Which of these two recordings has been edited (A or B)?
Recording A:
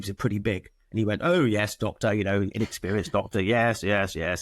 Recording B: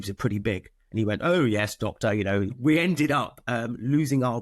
B